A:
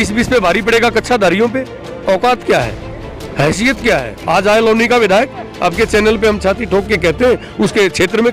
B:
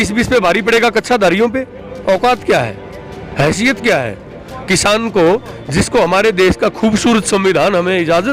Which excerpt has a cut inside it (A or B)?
A